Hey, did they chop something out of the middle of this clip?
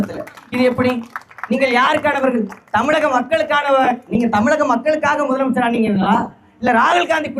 no; 0 cuts

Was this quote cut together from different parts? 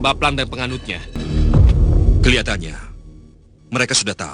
yes; 1 cut; at 1.2 s

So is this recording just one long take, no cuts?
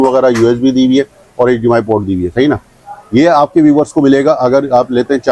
yes; 0 cuts

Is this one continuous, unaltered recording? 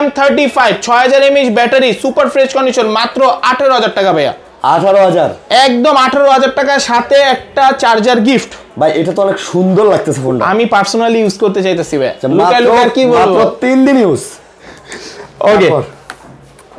yes; 0 cuts

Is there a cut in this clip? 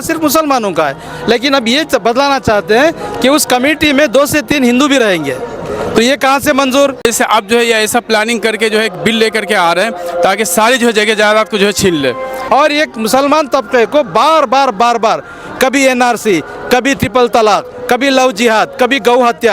yes; 2 cuts; at 7.0 s, 12.3 s

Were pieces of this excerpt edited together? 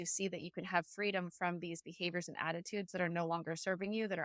no; 0 cuts

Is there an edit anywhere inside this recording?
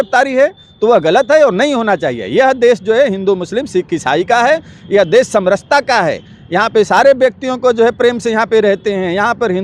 no; 0 cuts

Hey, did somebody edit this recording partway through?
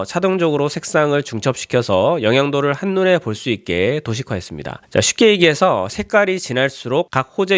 no; 0 cuts

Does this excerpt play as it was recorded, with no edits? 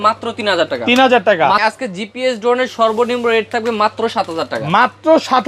no; 1 cut; at 1.6 s

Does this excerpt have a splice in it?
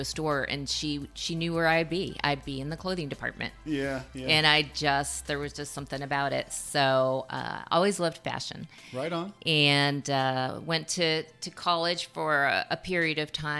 no; 0 cuts

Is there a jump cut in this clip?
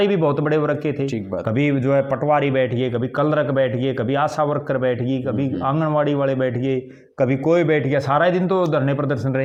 no; 0 cuts

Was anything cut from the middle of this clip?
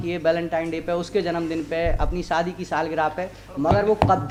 no; 0 cuts

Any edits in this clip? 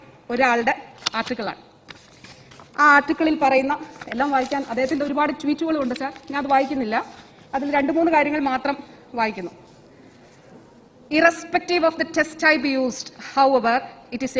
no; 0 cuts

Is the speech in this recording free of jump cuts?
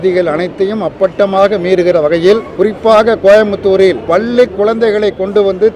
no; 1 cut; at 4.0 s

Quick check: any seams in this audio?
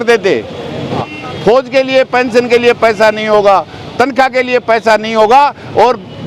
yes; 1 cut; at 1.1 s

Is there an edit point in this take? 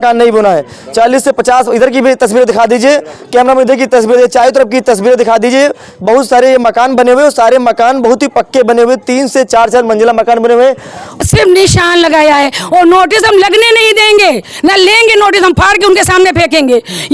yes; 1 cut; at 11.2 s

